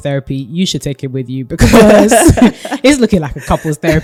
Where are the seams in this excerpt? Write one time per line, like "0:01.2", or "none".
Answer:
none